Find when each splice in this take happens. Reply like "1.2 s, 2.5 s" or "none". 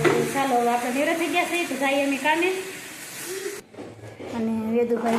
3.7 s